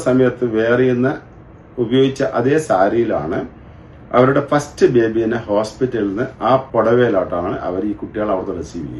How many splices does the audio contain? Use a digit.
1